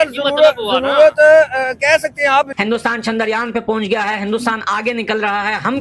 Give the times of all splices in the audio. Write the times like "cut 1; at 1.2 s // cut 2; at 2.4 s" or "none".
none